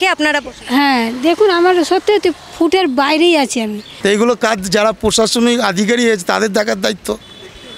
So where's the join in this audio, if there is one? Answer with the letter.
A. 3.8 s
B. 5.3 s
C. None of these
A